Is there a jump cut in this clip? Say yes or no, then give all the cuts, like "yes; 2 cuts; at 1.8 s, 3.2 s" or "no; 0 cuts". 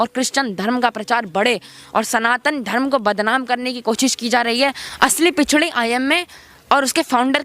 yes; 1 cut; at 4.8 s